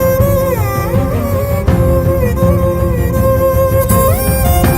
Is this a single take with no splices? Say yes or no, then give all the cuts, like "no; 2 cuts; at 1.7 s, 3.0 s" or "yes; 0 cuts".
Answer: yes; 0 cuts